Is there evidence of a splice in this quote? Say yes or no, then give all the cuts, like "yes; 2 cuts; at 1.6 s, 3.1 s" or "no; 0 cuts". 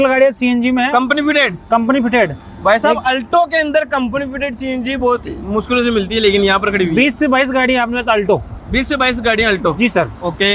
no; 0 cuts